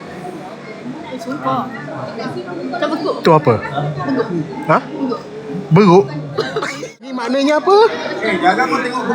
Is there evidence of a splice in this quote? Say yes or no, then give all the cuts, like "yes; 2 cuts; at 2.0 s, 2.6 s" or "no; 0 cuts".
yes; 1 cut; at 7.2 s